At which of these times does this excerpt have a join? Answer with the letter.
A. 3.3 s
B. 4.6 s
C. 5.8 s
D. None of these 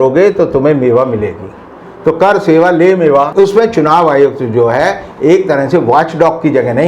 A